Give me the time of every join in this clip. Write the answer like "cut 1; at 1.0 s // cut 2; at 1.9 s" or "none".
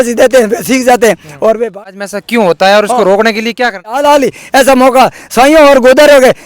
cut 1; at 1.7 s // cut 2; at 4.0 s